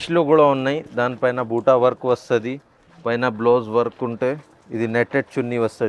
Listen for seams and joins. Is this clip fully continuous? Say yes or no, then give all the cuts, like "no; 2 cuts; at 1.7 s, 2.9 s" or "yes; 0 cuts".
yes; 0 cuts